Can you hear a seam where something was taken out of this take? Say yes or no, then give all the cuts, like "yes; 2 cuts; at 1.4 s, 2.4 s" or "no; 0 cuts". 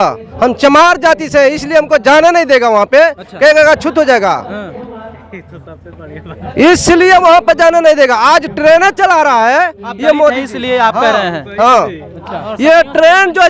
no; 0 cuts